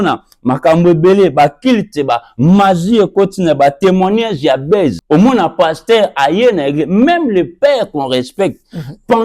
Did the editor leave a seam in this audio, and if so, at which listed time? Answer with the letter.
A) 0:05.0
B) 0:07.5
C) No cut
A